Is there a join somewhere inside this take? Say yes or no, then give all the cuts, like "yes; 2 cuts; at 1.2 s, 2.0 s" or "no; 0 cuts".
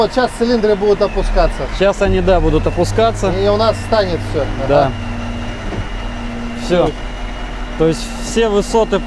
no; 0 cuts